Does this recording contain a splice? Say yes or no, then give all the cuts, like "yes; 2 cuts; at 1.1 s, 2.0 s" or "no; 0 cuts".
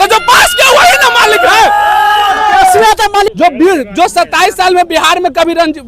yes; 1 cut; at 3.3 s